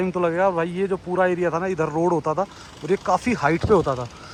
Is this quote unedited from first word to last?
yes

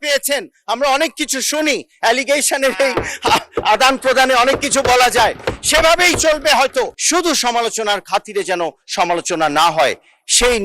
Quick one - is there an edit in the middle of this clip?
yes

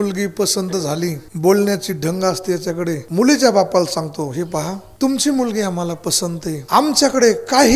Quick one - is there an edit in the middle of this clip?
yes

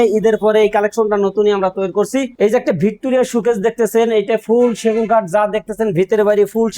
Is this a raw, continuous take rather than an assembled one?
no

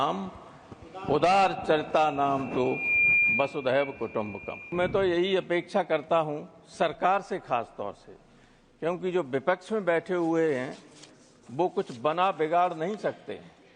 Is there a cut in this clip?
yes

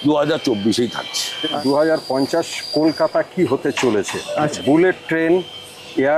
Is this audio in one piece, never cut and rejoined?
no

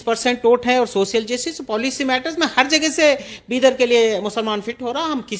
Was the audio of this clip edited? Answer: no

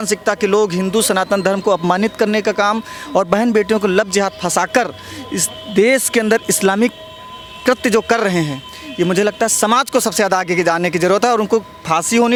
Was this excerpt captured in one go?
yes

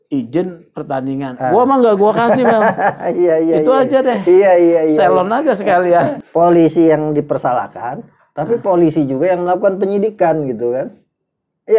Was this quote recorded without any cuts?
yes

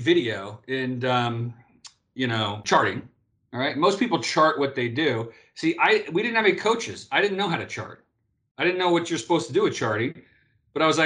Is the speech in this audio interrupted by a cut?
yes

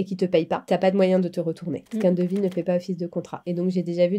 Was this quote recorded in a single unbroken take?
yes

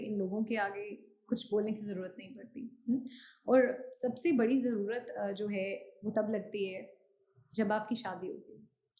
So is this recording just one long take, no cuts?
yes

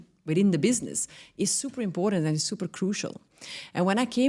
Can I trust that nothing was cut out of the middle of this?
yes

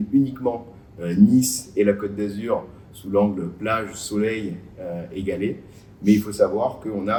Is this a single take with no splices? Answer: yes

